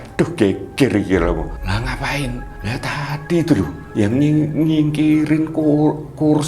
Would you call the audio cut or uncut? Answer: cut